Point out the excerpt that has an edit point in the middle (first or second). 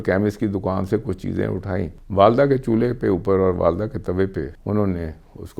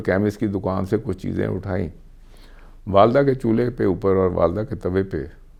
first